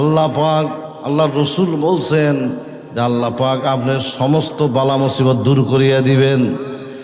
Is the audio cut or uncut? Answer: uncut